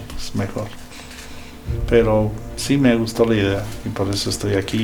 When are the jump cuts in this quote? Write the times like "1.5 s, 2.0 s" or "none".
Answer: none